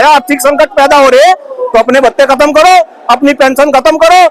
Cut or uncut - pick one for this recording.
uncut